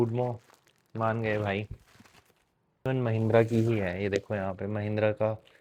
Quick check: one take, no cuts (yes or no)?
no